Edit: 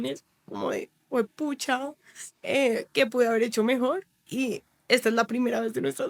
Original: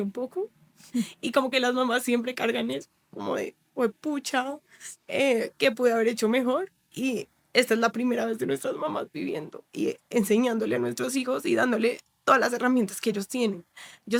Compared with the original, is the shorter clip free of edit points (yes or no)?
yes